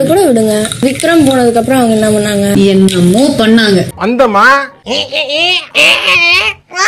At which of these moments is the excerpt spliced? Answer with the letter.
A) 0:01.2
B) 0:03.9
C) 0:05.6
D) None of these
B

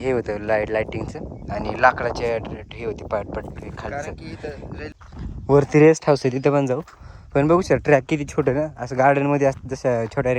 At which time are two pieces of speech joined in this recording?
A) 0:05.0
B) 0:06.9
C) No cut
A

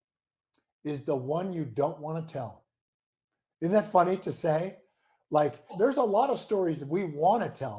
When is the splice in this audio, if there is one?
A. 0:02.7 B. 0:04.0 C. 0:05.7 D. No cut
C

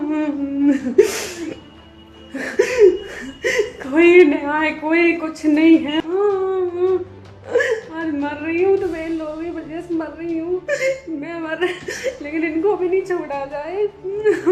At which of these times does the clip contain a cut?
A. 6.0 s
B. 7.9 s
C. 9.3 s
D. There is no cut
A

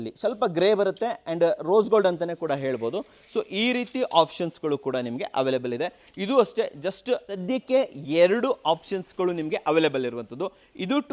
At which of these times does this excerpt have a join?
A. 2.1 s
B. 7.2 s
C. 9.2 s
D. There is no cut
B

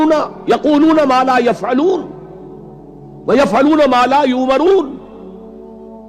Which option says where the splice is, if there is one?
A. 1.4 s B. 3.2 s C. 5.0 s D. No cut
C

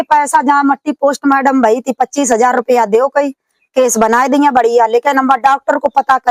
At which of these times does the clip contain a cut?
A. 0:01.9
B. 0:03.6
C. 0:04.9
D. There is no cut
D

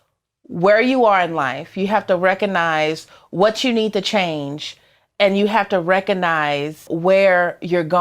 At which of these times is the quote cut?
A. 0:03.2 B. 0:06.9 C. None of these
B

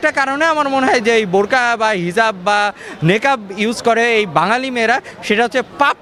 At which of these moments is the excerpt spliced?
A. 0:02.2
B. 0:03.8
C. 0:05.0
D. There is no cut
D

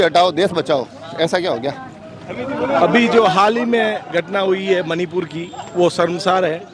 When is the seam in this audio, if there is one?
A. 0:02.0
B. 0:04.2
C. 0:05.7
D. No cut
D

